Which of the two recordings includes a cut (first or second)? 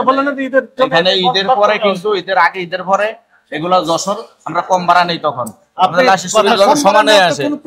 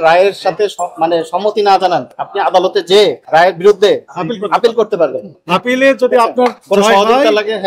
second